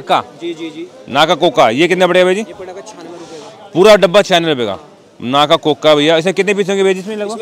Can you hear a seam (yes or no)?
no